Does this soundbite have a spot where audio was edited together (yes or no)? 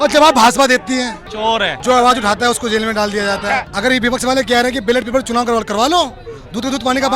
yes